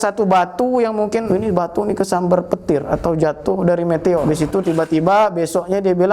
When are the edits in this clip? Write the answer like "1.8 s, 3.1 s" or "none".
1.2 s, 4.2 s